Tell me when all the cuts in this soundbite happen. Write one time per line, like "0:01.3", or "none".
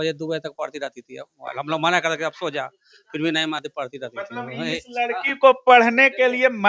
none